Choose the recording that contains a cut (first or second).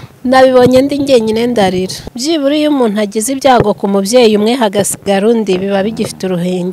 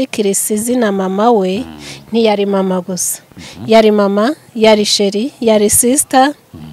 first